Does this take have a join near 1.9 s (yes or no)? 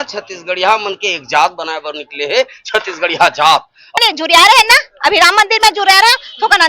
no